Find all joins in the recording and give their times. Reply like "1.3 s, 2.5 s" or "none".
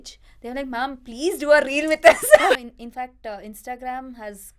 2.6 s